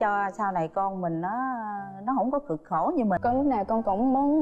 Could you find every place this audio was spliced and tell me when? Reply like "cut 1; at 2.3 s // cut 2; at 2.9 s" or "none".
cut 1; at 3.2 s